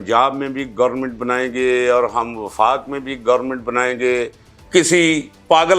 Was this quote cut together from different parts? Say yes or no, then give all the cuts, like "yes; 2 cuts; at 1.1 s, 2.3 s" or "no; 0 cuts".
yes; 1 cut; at 4.5 s